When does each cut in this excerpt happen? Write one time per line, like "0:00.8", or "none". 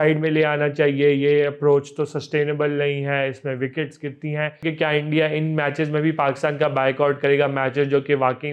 0:04.6